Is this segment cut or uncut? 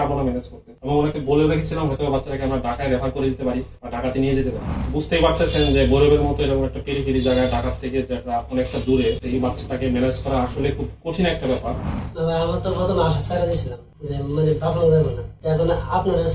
cut